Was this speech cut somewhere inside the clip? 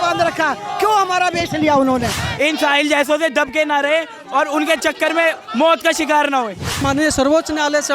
yes; 2 cuts; at 2.2 s, 6.8 s

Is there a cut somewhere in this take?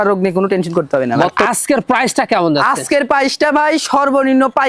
yes; 1 cut; at 1.4 s

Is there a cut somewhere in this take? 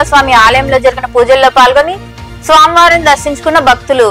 no; 0 cuts

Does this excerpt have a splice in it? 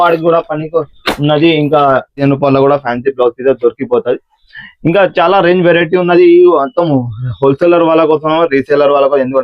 yes; 1 cut; at 2.2 s

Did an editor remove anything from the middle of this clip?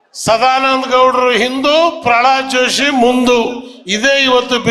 no; 0 cuts

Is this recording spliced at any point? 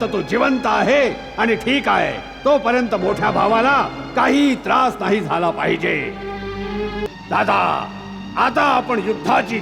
yes; 1 cut; at 7.0 s

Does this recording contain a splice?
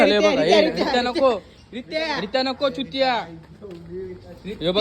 no; 0 cuts

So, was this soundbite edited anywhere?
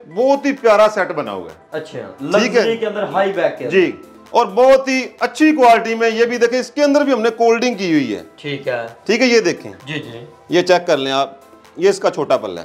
no; 0 cuts

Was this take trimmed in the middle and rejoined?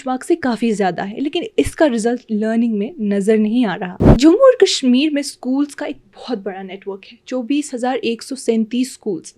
no; 0 cuts

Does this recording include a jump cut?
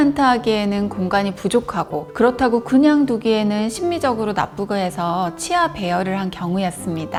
no; 0 cuts

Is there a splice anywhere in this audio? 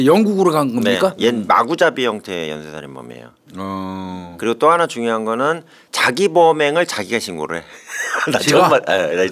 yes; 1 cut; at 1.2 s

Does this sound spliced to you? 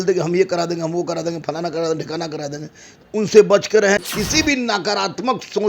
yes; 1 cut; at 4.0 s

